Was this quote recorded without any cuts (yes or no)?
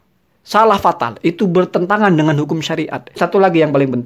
no